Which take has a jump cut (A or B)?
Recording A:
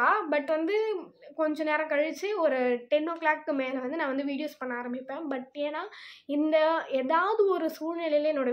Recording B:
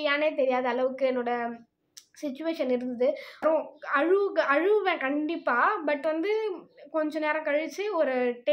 B